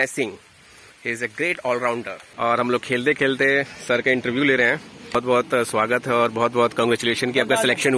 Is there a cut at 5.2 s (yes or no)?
yes